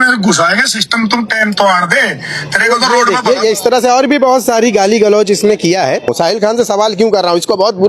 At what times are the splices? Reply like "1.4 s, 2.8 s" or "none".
6.1 s